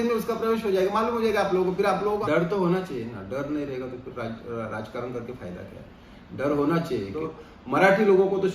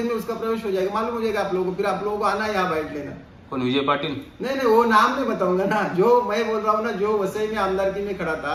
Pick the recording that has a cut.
first; 2 cuts; at 2.2 s, 7.2 s

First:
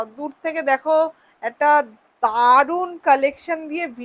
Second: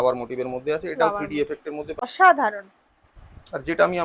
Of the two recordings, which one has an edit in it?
second; 1 cut; at 1.9 s

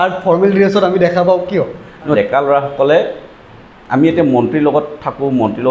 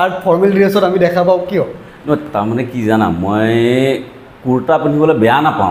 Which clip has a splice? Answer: first; 1 cut; at 2.2 s

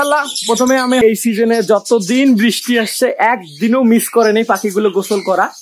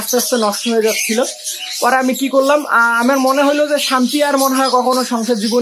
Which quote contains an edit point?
first; 1 cut; at 1.0 s

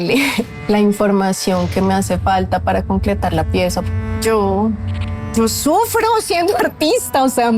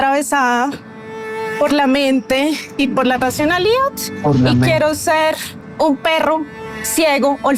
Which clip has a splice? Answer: first; 1 cut; at 3.8 s

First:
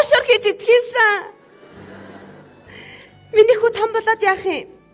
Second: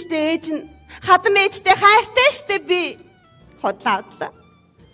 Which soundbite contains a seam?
second; 1 cut; at 2.5 s

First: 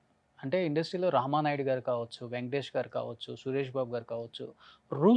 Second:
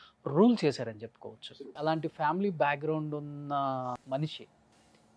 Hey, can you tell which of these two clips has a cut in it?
second; 2 cuts; at 1.7 s, 4.0 s

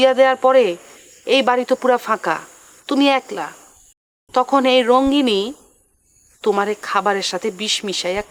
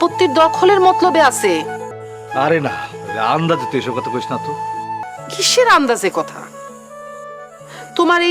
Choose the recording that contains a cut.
second; 2 cuts; at 2.0 s, 5.0 s

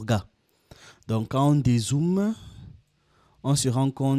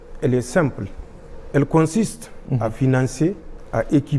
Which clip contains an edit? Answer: second; 1 cut; at 2.4 s

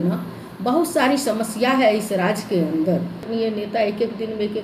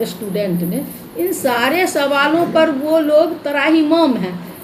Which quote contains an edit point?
first; 1 cut; at 3.3 s

